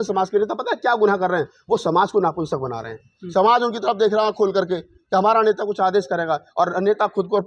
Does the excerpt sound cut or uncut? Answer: uncut